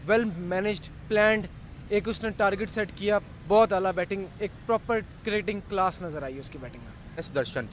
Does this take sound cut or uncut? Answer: uncut